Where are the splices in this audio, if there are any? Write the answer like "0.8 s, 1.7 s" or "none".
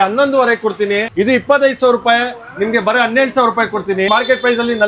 1.1 s, 4.1 s